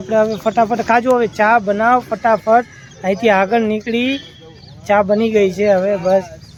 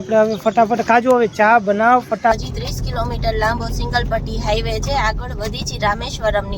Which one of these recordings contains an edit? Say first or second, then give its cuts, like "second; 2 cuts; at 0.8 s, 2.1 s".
second; 1 cut; at 2.3 s